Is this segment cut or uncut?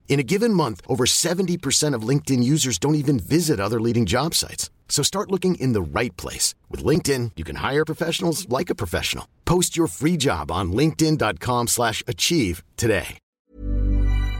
cut